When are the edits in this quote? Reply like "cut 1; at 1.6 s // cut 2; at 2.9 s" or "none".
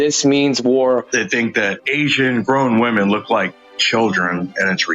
cut 1; at 1.0 s